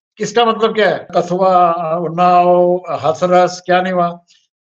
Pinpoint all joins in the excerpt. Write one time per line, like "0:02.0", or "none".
0:01.1